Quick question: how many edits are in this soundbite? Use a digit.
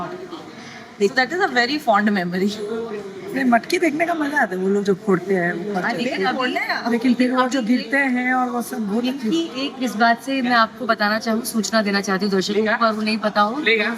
0